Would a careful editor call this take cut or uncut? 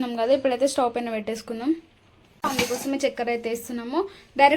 cut